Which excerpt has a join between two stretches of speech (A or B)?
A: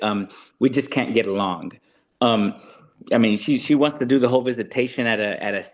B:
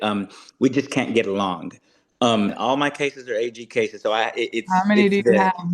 B